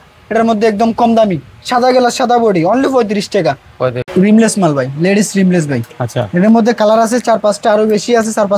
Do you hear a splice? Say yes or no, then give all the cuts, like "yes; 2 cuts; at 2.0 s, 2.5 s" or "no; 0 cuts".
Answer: yes; 1 cut; at 4.0 s